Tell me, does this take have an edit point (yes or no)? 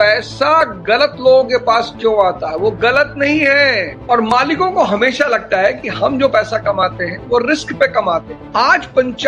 yes